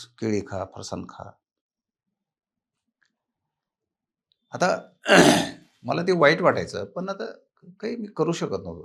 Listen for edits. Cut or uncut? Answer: uncut